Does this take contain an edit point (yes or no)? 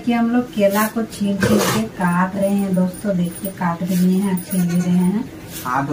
no